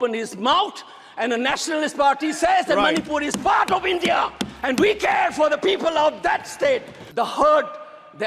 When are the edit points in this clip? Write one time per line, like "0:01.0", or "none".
0:07.0